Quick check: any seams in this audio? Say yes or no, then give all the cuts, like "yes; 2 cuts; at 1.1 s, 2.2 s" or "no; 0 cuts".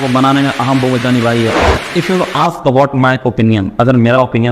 yes; 1 cut; at 1.7 s